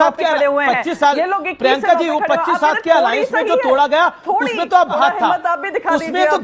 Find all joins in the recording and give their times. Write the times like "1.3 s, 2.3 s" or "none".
4.9 s